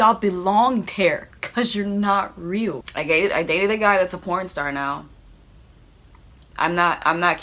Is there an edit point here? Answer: yes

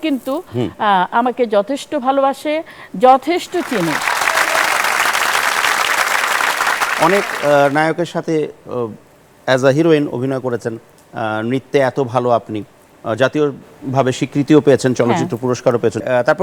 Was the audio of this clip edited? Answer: no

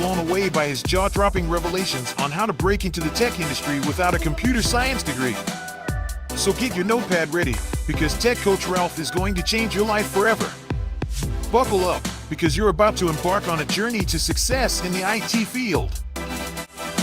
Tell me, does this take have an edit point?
yes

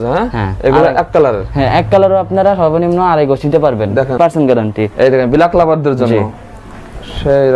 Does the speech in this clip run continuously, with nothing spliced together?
no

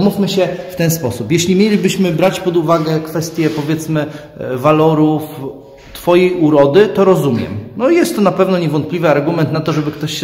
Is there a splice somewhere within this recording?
no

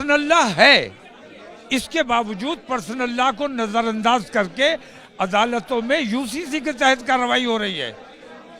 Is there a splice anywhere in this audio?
no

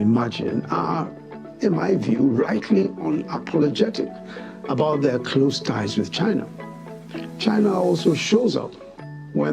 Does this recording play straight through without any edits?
yes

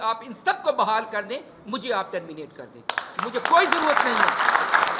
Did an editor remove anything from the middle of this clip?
no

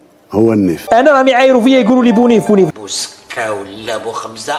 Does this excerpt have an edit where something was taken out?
no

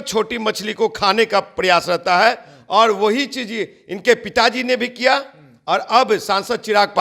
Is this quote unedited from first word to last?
yes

